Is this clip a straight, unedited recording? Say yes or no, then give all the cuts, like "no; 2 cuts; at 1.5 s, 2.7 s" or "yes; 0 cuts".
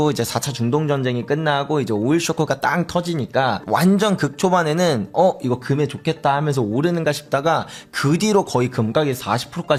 yes; 0 cuts